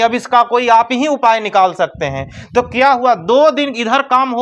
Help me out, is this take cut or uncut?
uncut